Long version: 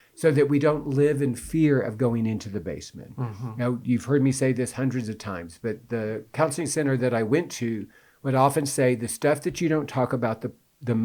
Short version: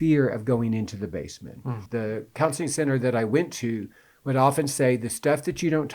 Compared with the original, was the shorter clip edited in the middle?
yes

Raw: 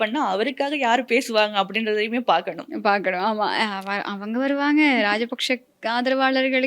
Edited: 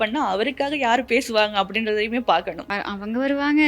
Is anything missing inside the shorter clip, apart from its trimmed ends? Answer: yes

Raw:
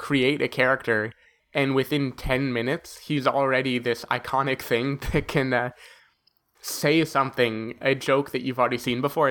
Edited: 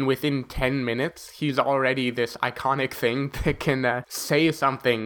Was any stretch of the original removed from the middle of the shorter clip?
yes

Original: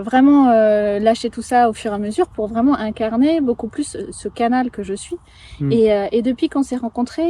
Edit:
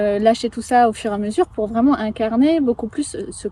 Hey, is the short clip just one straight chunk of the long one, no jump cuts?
yes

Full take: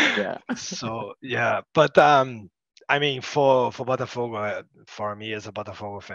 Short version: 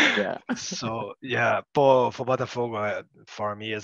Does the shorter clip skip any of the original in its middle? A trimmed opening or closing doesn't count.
yes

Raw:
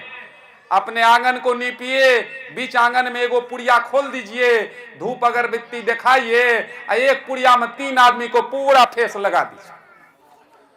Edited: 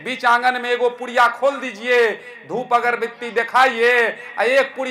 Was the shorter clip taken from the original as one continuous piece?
yes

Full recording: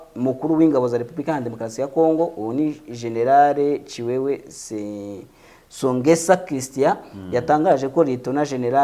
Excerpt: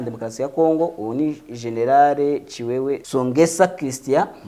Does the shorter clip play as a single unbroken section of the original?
no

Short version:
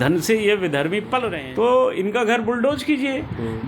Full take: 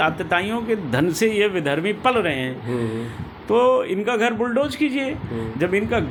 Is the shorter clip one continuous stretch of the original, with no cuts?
no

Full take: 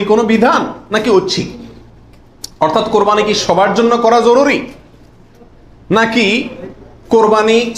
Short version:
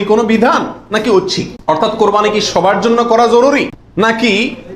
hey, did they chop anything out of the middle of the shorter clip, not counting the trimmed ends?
yes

